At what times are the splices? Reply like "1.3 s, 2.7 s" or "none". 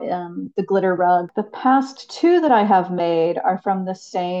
1.3 s